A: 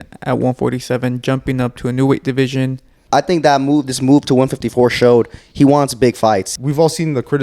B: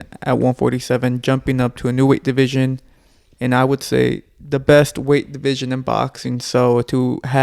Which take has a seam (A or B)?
A